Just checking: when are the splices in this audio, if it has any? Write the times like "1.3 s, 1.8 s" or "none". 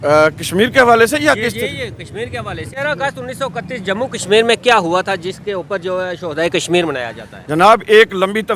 2.8 s